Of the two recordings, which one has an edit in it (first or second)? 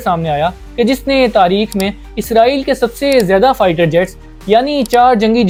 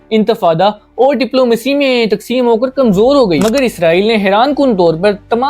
second